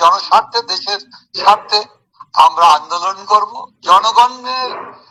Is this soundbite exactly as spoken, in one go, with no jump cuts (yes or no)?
yes